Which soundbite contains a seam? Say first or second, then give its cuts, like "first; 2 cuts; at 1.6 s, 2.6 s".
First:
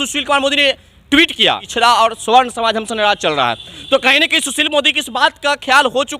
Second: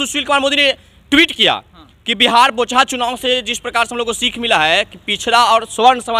first; 1 cut; at 1.7 s